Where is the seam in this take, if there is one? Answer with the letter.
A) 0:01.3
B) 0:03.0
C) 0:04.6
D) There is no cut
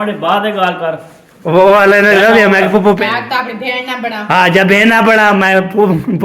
B